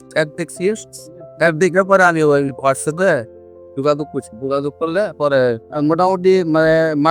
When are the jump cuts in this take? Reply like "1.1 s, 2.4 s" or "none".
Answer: 5.7 s